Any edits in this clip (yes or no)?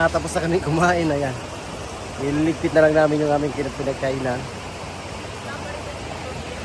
no